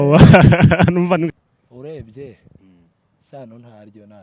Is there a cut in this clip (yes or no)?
yes